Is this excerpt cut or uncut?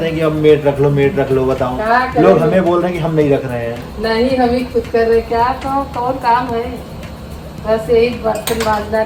uncut